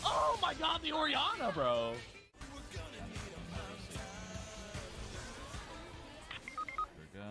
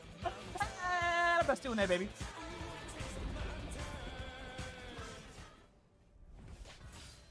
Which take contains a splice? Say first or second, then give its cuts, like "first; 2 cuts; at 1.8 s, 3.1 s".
first; 1 cut; at 2.4 s